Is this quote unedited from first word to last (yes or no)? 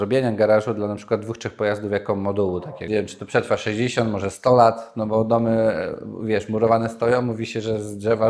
no